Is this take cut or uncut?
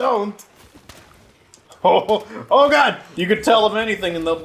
cut